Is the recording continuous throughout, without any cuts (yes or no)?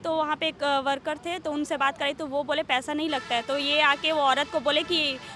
yes